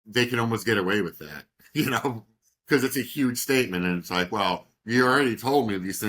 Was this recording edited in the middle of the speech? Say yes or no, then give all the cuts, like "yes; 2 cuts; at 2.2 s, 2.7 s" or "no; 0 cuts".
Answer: no; 0 cuts